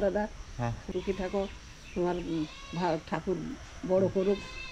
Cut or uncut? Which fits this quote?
cut